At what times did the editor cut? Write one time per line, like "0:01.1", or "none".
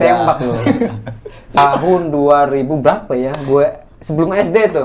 0:01.6